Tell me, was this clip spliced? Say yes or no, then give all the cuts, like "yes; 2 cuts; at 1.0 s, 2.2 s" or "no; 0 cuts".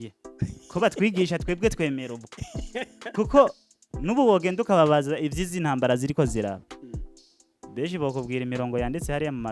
no; 0 cuts